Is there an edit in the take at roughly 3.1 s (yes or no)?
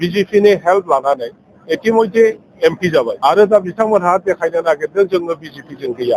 yes